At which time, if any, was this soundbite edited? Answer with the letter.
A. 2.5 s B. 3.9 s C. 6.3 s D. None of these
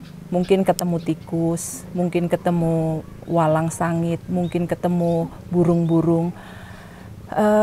D